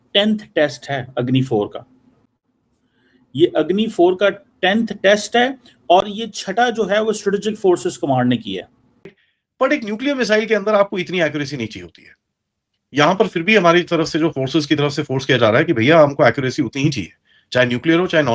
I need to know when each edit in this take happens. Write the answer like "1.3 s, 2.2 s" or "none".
9.2 s